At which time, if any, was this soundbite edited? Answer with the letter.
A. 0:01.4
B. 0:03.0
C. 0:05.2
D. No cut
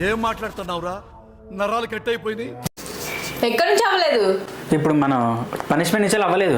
B